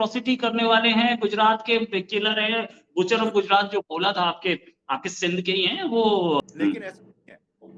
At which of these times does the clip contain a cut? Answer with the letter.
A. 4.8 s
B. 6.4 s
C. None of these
B